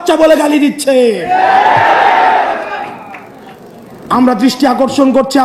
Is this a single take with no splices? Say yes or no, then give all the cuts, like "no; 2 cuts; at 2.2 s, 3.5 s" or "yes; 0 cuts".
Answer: yes; 0 cuts